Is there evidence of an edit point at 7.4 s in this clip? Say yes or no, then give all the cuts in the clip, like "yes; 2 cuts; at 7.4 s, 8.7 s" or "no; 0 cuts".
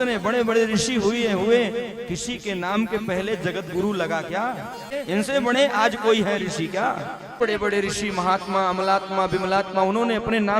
yes; 2 cuts; at 4.9 s, 7.4 s